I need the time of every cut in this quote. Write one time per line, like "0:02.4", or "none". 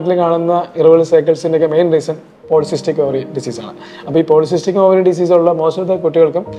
none